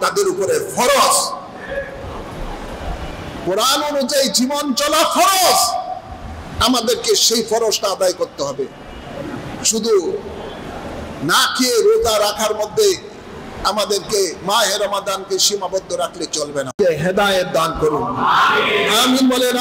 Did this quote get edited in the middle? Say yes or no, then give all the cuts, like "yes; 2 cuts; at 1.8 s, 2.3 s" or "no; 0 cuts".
no; 0 cuts